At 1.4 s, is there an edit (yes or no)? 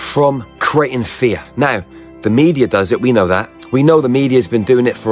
no